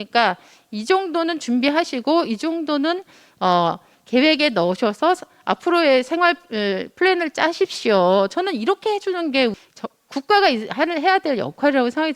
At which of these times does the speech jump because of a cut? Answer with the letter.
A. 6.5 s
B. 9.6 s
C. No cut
B